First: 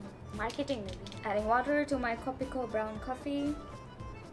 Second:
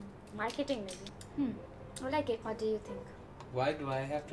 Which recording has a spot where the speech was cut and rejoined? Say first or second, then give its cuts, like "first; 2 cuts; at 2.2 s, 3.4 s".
second; 1 cut; at 1.1 s